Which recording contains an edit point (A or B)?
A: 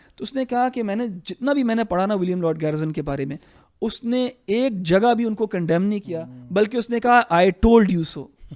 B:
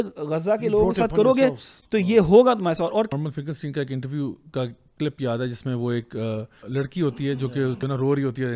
B